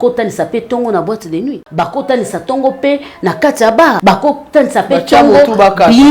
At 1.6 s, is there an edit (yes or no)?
yes